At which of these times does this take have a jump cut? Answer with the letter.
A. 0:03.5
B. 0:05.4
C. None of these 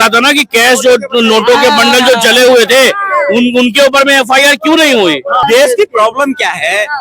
B